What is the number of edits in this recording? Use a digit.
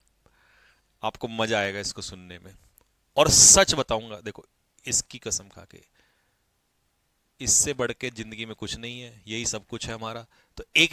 0